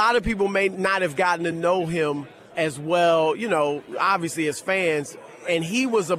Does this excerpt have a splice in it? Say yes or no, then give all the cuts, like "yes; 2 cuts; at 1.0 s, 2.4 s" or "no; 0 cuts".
yes; 2 cuts; at 0.8 s, 2.6 s